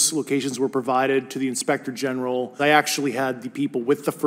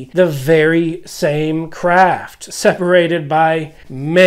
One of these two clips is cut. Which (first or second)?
first